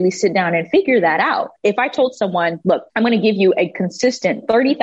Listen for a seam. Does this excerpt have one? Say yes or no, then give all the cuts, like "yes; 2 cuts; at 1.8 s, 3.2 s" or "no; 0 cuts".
yes; 2 cuts; at 1.5 s, 2.9 s